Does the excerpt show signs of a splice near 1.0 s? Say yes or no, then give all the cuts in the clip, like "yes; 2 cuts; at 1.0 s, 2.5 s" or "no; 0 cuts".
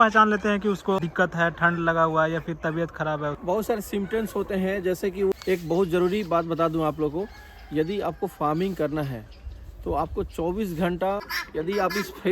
yes; 4 cuts; at 1.0 s, 3.4 s, 5.3 s, 11.4 s